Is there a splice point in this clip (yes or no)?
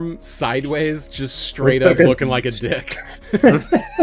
no